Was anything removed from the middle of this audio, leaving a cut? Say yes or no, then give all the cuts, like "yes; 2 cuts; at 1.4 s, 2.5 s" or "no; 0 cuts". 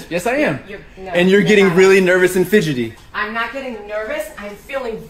no; 0 cuts